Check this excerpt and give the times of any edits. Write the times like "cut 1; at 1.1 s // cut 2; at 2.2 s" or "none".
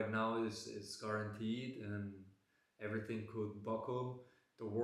none